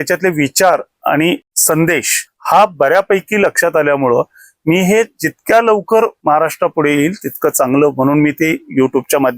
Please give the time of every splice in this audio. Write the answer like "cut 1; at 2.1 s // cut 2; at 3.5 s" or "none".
cut 1; at 6.2 s